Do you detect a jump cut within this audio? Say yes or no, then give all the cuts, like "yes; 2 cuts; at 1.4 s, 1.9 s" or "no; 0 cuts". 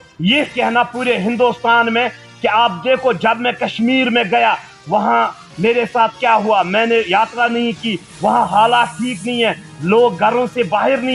no; 0 cuts